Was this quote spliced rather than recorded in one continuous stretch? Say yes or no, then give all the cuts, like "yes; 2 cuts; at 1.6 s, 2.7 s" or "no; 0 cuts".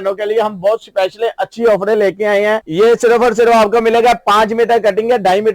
yes; 1 cut; at 2.7 s